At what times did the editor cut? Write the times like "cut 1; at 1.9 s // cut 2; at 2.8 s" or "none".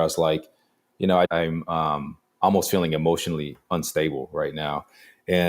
cut 1; at 1.3 s